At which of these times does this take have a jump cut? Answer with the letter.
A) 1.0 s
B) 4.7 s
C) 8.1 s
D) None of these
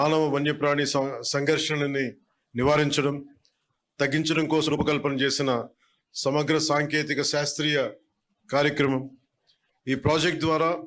B